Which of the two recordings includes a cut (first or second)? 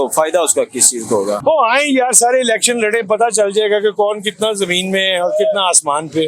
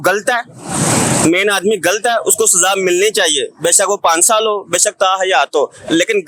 first